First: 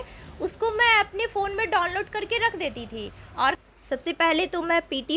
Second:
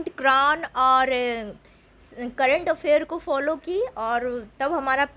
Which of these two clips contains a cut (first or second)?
first